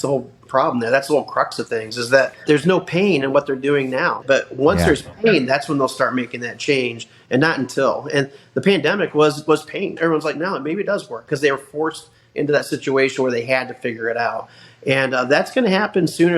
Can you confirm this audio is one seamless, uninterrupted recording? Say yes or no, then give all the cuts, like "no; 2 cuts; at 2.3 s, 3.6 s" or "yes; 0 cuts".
no; 3 cuts; at 2.4 s, 4.2 s, 9.9 s